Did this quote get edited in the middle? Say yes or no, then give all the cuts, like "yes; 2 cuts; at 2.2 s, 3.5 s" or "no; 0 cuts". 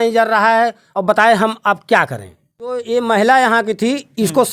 yes; 1 cut; at 2.8 s